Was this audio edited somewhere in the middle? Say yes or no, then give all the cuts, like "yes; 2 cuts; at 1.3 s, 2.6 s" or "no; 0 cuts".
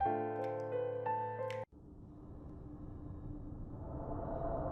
yes; 1 cut; at 1.6 s